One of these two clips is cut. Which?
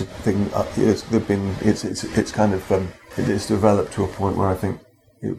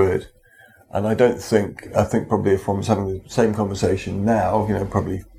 first; 1 cut; at 3.0 s

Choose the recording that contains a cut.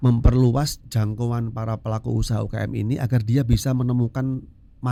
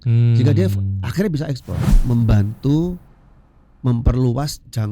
second; 1 cut; at 1.9 s

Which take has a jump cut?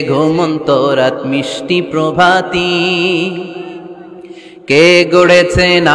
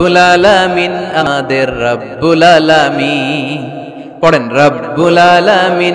second; 1 cut; at 1.2 s

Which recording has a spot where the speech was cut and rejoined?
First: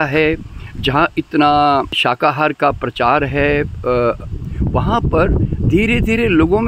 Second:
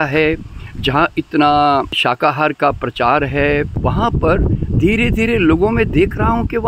second; 1 cut; at 3.7 s

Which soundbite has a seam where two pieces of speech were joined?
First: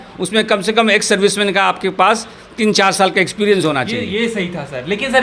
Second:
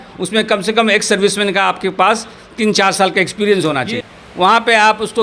second; 1 cut; at 4.0 s

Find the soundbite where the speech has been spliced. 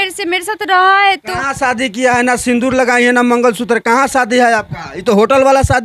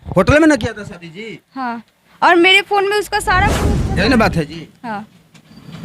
second; 1 cut; at 3.7 s

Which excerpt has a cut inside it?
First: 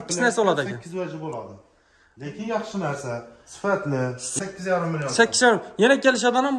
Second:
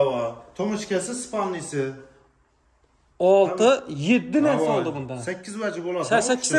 first; 1 cut; at 4.3 s

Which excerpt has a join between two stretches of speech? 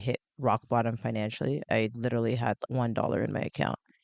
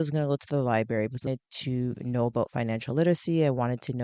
first; 2 cuts; at 1.6 s, 2.6 s

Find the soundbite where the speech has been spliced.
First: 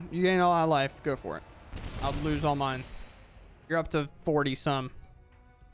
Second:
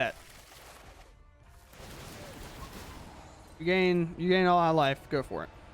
second; 1 cut; at 1.4 s

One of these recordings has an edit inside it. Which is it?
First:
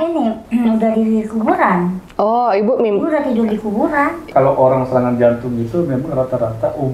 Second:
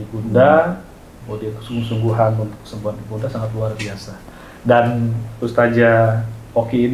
first; 1 cut; at 4.3 s

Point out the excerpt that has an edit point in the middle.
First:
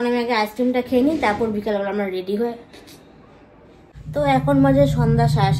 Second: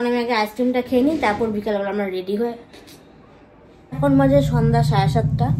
second; 1 cut; at 4.0 s

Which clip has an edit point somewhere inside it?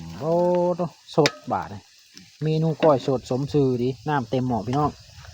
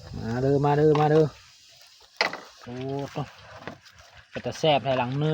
second; 1 cut; at 2.5 s

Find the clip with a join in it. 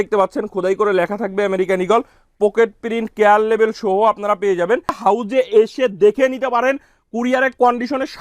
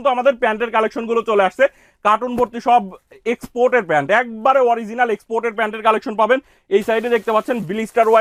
first; 1 cut; at 5.0 s

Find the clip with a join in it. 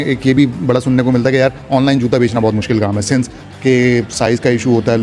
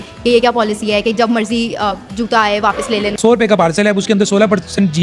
second; 1 cut; at 3.2 s

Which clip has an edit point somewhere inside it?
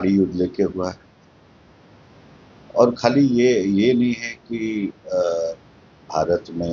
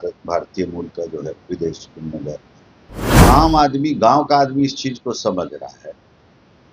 second; 1 cut; at 3.1 s

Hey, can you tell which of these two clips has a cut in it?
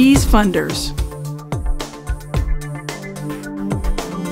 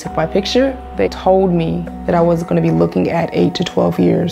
second; 1 cut; at 1.1 s

